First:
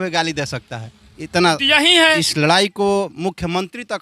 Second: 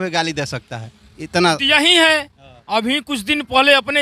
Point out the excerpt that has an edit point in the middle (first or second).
first